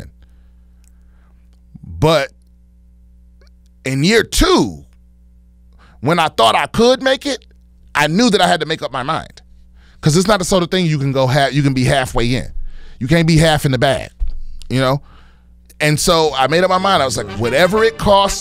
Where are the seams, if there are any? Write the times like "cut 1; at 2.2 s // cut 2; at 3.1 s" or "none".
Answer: none